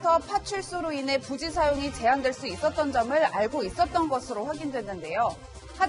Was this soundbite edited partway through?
no; 0 cuts

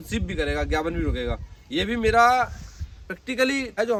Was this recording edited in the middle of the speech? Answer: no; 0 cuts

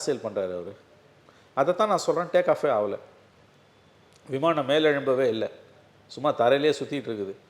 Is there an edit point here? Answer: no; 0 cuts

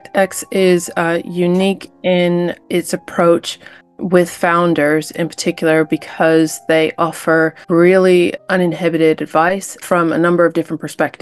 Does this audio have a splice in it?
no; 0 cuts

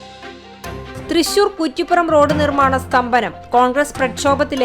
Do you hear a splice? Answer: yes; 1 cut; at 1.0 s

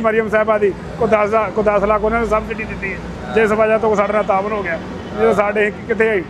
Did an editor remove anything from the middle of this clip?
no; 0 cuts

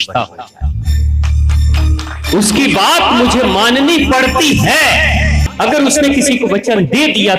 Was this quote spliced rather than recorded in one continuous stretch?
yes; 1 cut; at 5.4 s

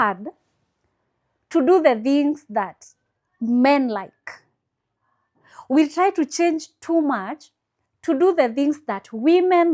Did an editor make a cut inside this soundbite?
no; 0 cuts

